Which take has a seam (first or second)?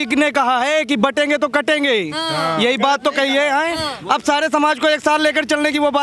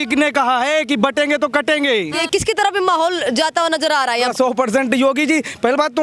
second